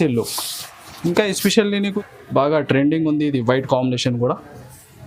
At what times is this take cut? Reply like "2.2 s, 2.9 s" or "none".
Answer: 1.9 s